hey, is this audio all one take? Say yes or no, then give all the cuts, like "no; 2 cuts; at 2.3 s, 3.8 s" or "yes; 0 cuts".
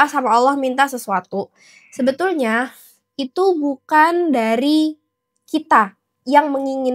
yes; 0 cuts